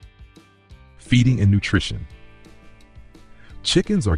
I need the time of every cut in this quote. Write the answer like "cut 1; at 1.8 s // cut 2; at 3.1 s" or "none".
cut 1; at 1.1 s